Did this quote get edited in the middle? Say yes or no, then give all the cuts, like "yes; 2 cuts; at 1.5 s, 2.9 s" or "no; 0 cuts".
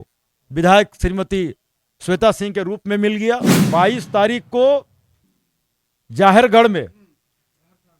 yes; 1 cut; at 3.5 s